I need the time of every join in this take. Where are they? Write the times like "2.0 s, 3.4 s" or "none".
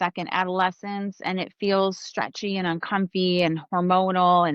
none